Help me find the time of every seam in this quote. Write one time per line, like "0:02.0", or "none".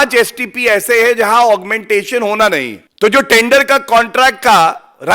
0:02.8